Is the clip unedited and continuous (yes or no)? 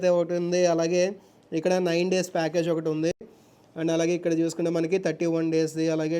yes